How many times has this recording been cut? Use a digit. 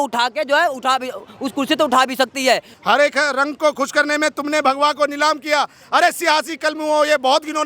1